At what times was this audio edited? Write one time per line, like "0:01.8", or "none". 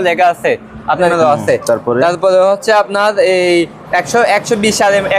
0:01.1